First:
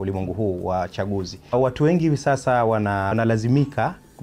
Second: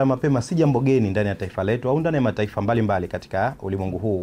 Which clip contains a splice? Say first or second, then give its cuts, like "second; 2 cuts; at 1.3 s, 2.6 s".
first; 2 cuts; at 1.5 s, 3.1 s